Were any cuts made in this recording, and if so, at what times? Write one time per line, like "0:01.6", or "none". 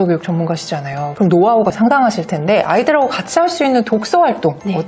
0:01.8